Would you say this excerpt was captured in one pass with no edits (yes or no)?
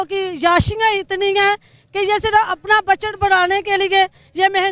yes